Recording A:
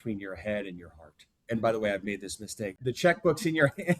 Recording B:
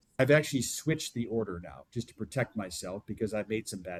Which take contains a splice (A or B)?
A